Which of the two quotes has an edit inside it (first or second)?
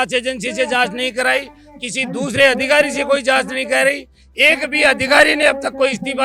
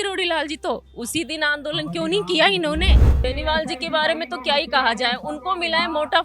second